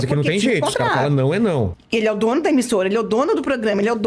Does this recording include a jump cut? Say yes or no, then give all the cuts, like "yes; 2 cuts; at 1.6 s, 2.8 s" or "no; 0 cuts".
yes; 1 cut; at 1.8 s